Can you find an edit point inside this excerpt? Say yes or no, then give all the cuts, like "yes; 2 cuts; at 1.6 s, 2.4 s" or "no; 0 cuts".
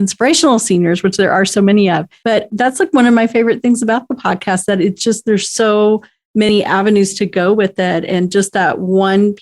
yes; 1 cut; at 2.4 s